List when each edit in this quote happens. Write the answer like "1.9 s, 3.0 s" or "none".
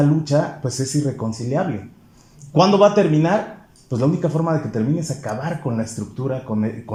none

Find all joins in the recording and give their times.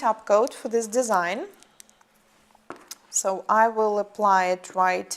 none

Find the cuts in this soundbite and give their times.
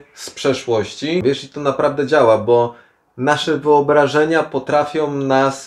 1.2 s

